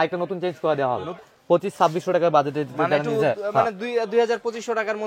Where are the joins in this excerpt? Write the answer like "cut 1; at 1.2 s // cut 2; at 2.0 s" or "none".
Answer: cut 1; at 1.3 s

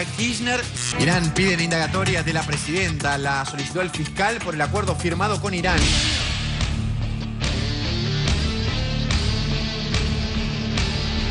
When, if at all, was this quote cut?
none

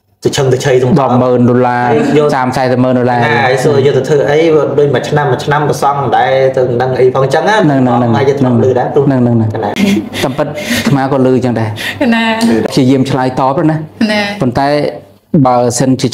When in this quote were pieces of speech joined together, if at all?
cut 1; at 9.8 s // cut 2; at 12.7 s

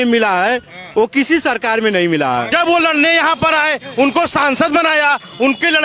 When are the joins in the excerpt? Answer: cut 1; at 2.5 s

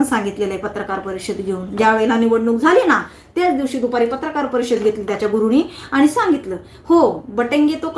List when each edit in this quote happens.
none

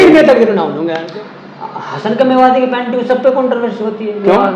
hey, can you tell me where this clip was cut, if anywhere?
cut 1; at 1.0 s

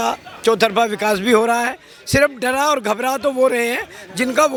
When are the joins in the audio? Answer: none

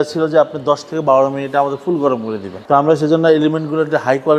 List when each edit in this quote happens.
cut 1; at 2.6 s

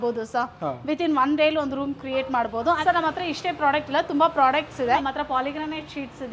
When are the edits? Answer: cut 1; at 2.8 s // cut 2; at 5.0 s

